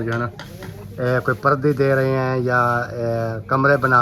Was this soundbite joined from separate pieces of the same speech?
no; 0 cuts

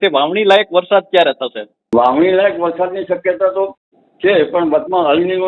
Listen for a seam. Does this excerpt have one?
yes; 1 cut; at 1.7 s

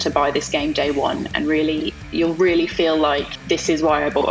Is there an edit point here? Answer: yes; 1 cut; at 3.3 s

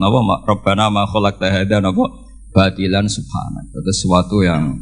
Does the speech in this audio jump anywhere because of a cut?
no; 0 cuts

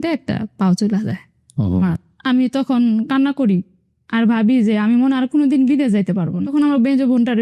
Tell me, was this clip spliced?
yes; 2 cuts; at 1.9 s, 6.4 s

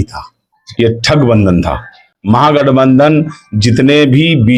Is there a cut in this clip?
no; 0 cuts

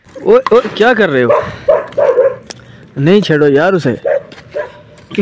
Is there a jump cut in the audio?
no; 0 cuts

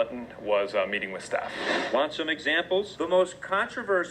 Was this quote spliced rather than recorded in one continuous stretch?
yes; 1 cut; at 2.9 s

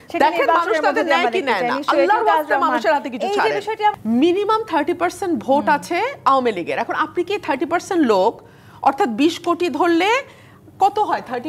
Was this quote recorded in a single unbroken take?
no; 1 cut; at 3.9 s

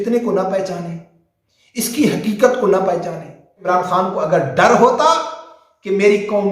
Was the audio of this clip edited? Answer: yes; 1 cut; at 3.6 s

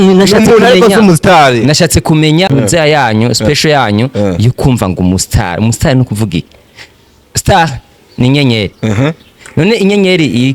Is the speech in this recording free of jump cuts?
no; 1 cut; at 2.5 s

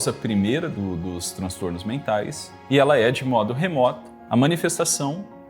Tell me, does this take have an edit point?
yes; 2 cuts; at 2.5 s, 4.1 s

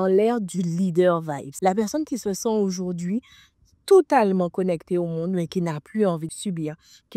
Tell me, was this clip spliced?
yes; 2 cuts; at 1.4 s, 6.3 s

